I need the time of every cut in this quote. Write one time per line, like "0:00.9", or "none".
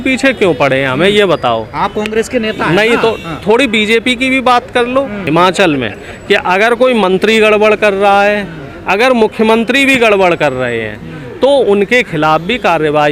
0:05.2